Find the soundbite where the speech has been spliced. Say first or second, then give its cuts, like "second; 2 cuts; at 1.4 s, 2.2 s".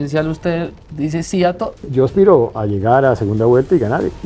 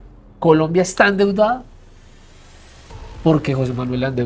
first; 1 cut; at 1.9 s